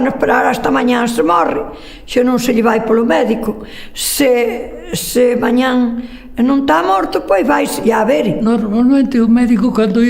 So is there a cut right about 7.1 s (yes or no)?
no